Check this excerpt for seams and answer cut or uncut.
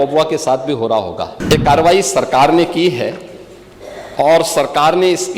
cut